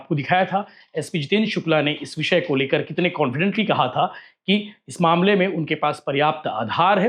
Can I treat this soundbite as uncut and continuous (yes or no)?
yes